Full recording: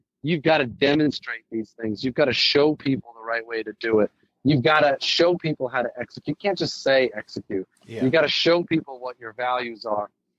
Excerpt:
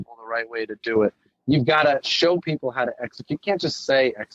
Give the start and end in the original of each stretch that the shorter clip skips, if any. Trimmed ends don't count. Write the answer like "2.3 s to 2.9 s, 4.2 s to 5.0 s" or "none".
none